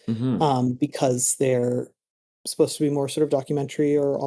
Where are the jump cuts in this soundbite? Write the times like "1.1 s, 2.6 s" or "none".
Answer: none